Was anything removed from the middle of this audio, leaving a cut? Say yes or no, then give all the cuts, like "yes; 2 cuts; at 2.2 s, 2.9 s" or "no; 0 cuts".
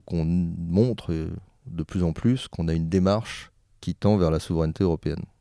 no; 0 cuts